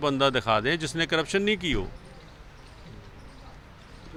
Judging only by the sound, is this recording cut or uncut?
uncut